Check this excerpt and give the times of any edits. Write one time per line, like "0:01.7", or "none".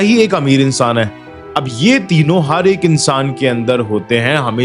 0:01.2